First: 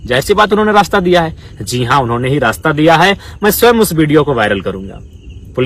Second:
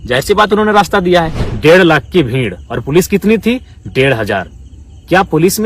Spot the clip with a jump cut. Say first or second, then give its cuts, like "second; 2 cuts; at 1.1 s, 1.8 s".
second; 1 cut; at 1.4 s